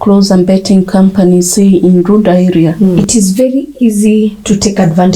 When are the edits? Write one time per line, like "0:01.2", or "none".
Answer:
0:03.0